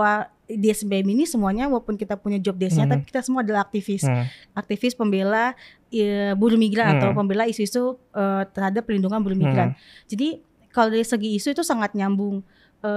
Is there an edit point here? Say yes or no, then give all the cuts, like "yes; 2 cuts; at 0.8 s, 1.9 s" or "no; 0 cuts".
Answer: no; 0 cuts